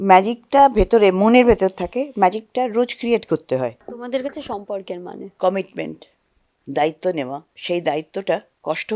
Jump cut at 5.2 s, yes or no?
yes